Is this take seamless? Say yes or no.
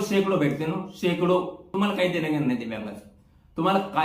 no